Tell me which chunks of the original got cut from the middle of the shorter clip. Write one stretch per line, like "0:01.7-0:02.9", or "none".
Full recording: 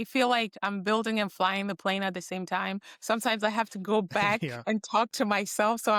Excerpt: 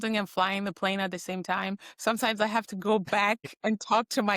none